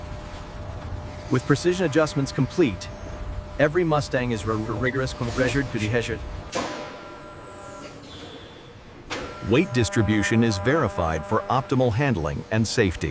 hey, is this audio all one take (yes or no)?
yes